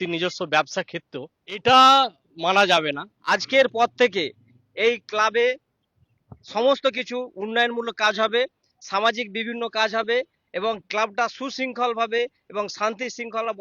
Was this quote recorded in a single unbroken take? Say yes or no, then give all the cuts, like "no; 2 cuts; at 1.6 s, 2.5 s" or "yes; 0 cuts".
no; 2 cuts; at 1.6 s, 3.1 s